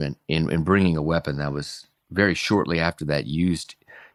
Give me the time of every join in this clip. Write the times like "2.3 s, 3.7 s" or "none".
none